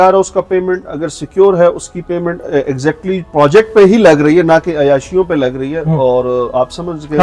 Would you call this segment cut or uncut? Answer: uncut